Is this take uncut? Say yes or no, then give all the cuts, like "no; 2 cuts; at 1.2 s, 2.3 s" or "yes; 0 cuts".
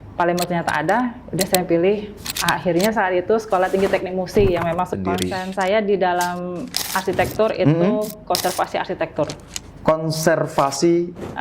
no; 1 cut; at 4.9 s